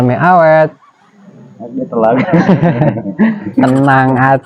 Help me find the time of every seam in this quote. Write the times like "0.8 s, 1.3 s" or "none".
none